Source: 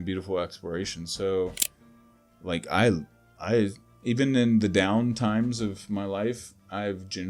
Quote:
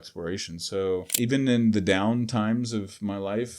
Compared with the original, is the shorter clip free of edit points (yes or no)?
no